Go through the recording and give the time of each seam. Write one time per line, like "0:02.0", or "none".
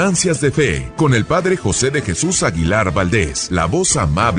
0:00.8
0:03.4